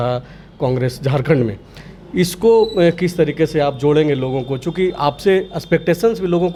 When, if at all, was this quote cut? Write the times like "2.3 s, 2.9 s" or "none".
none